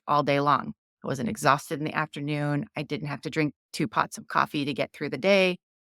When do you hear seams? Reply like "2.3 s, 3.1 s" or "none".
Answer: none